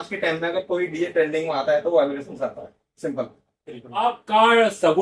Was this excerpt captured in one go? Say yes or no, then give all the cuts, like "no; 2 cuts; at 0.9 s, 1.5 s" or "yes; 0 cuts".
no; 1 cut; at 4.0 s